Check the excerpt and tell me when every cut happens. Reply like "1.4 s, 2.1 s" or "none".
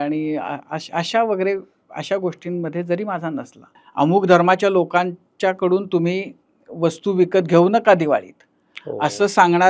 3.8 s